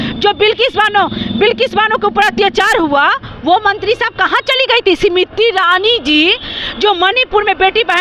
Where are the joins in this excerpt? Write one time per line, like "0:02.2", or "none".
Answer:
none